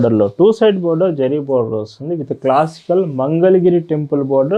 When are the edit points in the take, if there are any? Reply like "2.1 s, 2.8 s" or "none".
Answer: none